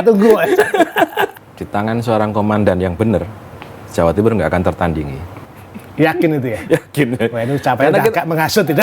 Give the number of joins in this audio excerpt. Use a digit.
1